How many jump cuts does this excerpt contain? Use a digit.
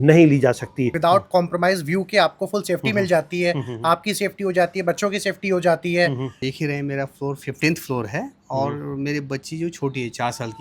2